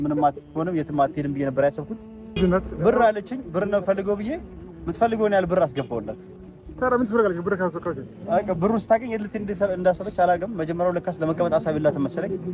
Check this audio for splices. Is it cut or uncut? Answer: cut